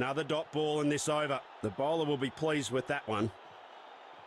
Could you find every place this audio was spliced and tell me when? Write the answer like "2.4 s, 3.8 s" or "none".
3.3 s